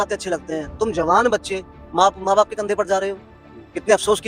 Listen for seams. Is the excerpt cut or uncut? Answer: uncut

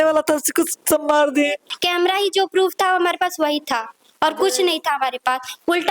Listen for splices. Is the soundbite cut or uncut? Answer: cut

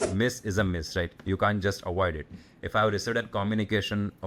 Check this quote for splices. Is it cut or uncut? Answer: uncut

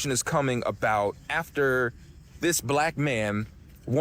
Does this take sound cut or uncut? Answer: uncut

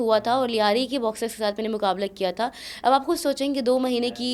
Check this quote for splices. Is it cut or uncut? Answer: uncut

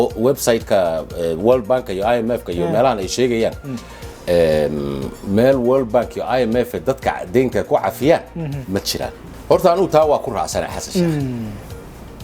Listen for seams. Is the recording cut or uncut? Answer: cut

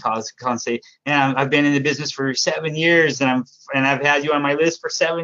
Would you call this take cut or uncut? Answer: uncut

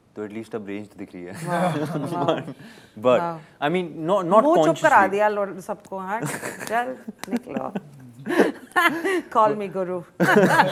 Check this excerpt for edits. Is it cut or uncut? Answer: uncut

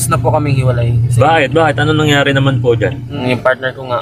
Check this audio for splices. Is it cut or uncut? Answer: cut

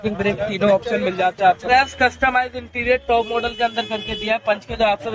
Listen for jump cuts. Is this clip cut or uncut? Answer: cut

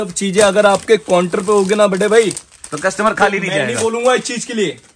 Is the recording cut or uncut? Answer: uncut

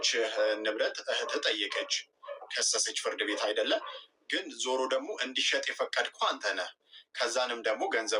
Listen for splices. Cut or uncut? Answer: uncut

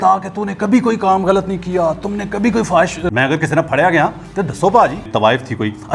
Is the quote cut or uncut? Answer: cut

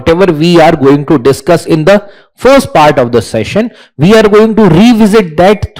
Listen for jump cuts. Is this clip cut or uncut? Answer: uncut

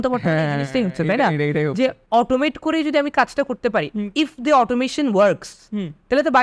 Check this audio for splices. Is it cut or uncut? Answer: uncut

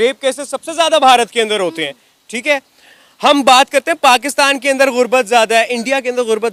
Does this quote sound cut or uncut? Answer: uncut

